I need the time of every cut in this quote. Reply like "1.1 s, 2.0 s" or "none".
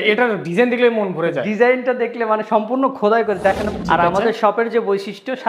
3.7 s

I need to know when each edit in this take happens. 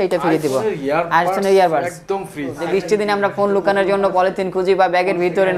2.5 s

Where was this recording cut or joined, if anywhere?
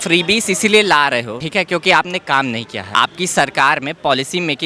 1.4 s, 2.7 s

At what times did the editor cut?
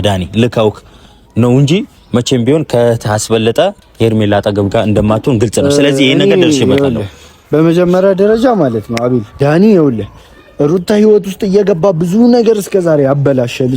3.8 s, 9.3 s

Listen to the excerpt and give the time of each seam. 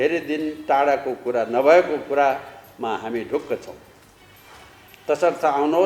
none

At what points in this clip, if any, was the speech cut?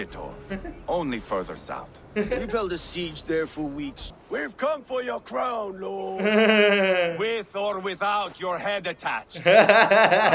4.1 s

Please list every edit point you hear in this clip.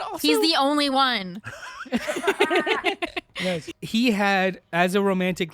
3.7 s

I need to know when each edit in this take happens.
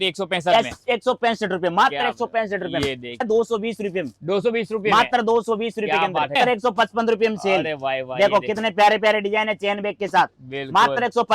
3.3 s, 6.4 s

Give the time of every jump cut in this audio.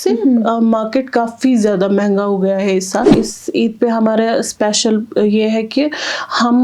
3.1 s

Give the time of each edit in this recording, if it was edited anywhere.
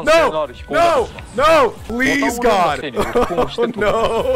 1.8 s, 2.8 s

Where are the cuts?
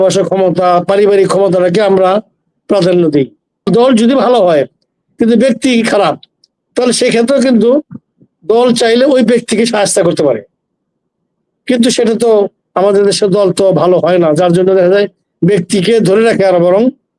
3.7 s

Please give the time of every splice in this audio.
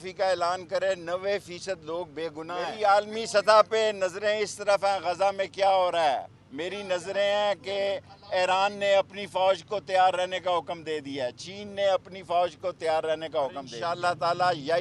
2.7 s, 13.7 s

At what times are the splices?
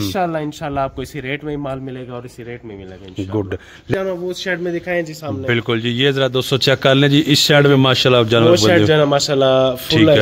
3.9 s

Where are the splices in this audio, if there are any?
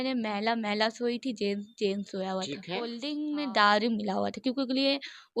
3.0 s

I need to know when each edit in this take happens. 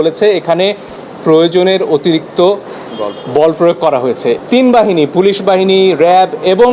4.4 s

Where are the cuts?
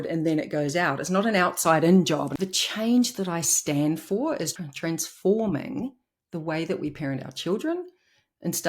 2.3 s, 4.5 s

